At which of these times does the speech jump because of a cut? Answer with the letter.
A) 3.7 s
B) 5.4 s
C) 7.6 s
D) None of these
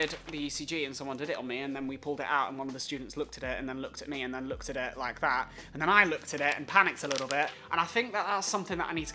C